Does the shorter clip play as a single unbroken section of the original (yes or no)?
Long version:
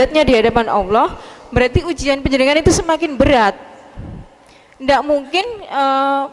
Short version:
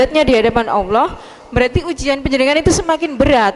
yes